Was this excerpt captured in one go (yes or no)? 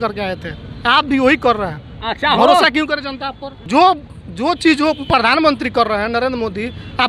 no